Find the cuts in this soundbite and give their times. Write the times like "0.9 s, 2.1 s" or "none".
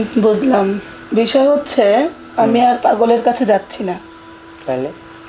none